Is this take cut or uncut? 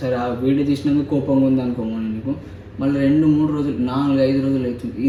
uncut